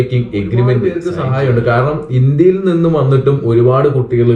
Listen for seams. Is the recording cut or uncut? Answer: cut